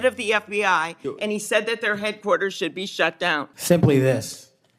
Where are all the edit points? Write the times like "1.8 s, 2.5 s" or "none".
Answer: 3.5 s